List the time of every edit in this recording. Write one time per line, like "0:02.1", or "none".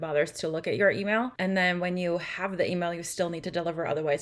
0:01.3